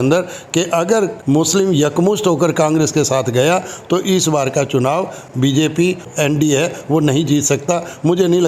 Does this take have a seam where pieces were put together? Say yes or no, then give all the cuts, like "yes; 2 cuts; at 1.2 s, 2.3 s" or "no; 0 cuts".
yes; 3 cuts; at 1.2 s, 5.2 s, 6.1 s